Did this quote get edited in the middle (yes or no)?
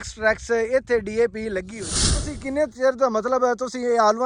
yes